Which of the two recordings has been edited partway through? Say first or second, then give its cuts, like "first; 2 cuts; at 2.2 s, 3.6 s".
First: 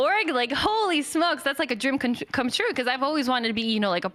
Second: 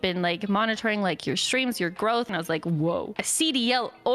second; 2 cuts; at 2.3 s, 3.2 s